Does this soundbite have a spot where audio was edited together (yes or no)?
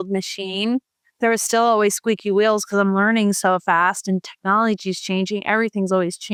no